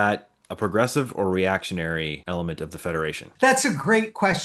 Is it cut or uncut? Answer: cut